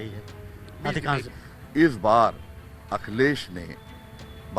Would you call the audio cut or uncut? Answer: cut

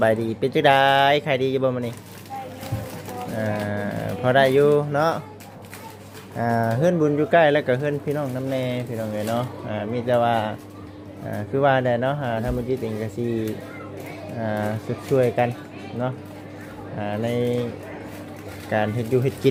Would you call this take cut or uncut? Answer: uncut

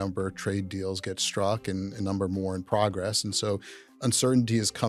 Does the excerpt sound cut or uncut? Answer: uncut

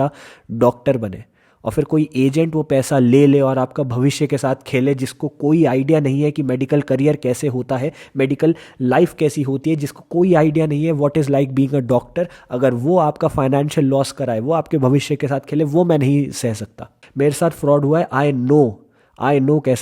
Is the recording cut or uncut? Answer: cut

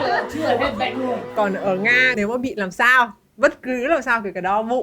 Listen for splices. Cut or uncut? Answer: cut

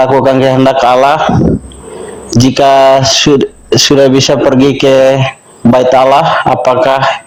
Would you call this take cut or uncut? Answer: uncut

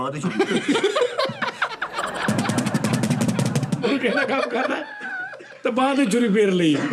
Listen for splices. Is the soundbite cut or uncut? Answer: uncut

